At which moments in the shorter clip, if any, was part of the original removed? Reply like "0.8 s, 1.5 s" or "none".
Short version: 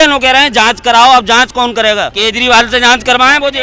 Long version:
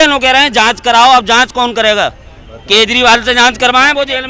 2.2 s